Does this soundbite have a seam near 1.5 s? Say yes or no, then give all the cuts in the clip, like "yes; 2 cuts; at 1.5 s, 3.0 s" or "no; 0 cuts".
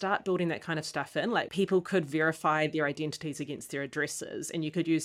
yes; 1 cut; at 1.5 s